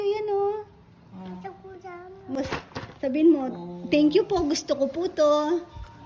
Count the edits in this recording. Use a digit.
1